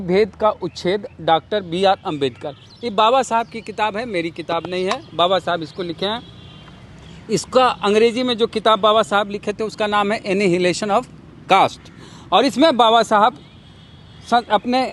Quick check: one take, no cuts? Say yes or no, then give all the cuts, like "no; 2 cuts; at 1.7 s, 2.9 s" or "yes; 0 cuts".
yes; 0 cuts